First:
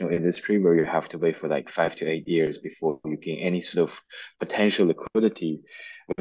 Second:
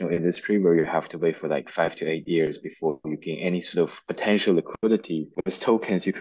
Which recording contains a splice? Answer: second; 2 cuts; at 4.0 s, 5.3 s

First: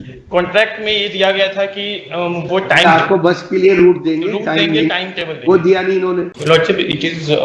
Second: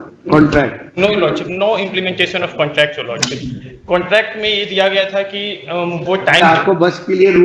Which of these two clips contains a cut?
first; 1 cut; at 6.3 s

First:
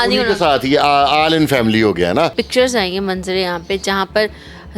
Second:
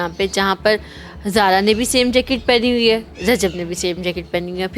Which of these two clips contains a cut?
first; 1 cut; at 2.4 s

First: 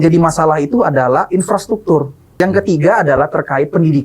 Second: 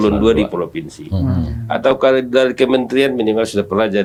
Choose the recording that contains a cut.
first; 1 cut; at 2.3 s

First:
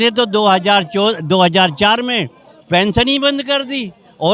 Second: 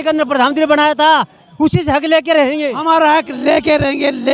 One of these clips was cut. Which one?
second; 1 cut; at 2.7 s

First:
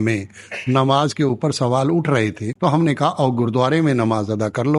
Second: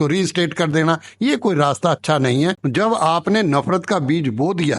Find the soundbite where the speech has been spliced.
second; 1 cut; at 2.6 s

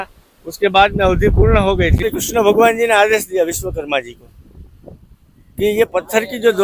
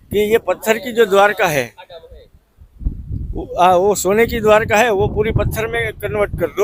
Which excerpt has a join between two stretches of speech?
first; 1 cut; at 2.0 s

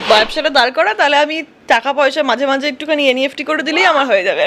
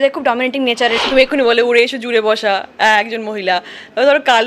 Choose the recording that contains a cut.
second; 1 cut; at 1.0 s

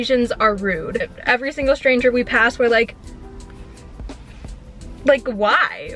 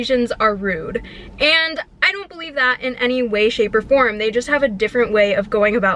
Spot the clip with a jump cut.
first; 1 cut; at 1.1 s

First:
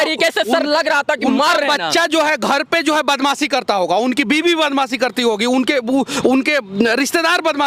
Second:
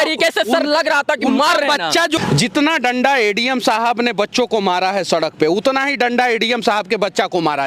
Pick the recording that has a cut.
second; 1 cut; at 2.2 s

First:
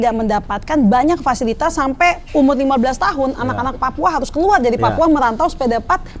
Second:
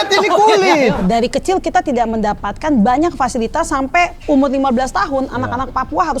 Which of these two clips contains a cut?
second; 1 cut; at 1.0 s

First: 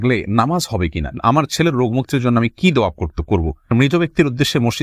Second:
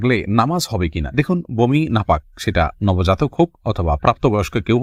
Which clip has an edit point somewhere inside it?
first; 2 cuts; at 1.1 s, 3.7 s

